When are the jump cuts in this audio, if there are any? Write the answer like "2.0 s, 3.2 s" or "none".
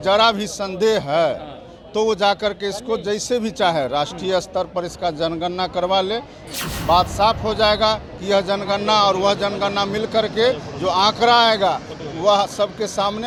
none